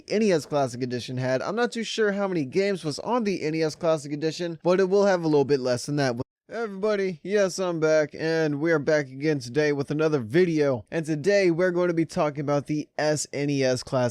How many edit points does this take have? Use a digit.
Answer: 0